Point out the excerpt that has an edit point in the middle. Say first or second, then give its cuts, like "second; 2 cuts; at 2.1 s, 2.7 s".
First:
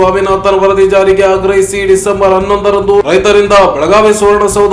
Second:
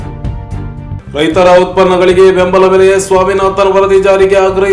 second; 1 cut; at 1.0 s